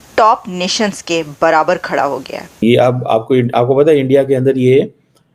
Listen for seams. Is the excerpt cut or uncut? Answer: cut